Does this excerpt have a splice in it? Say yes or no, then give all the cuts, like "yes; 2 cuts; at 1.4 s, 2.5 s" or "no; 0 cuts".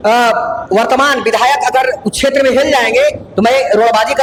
no; 0 cuts